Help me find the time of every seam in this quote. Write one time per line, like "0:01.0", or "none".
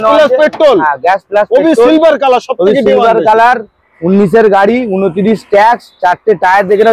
none